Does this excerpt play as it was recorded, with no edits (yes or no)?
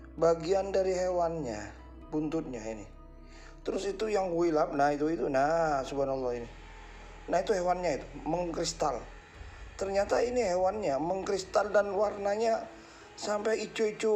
yes